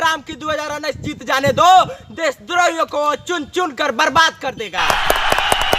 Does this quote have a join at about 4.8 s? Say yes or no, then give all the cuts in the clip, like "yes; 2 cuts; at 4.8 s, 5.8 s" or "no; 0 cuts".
yes; 1 cut; at 4.8 s